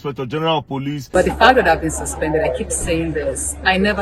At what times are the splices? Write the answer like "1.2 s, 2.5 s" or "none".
1.1 s